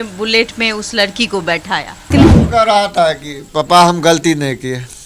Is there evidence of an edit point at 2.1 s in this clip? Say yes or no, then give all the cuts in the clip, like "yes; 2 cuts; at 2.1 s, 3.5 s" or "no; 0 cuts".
yes; 1 cut; at 2.1 s